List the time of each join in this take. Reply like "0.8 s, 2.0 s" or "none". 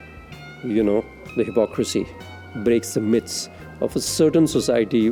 none